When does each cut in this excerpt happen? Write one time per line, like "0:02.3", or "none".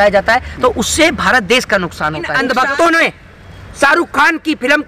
0:02.3